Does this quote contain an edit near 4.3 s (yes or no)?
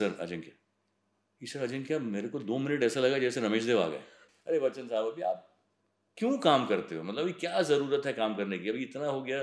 yes